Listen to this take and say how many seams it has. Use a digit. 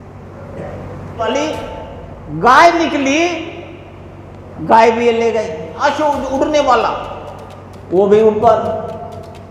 2